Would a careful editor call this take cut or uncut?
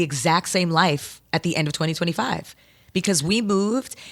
uncut